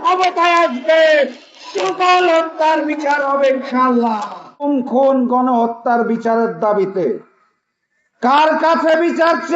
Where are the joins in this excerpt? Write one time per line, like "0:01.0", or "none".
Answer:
0:04.7